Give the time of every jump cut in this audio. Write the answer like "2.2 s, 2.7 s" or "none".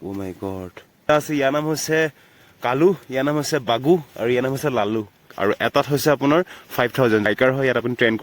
1.1 s, 5.3 s, 7.3 s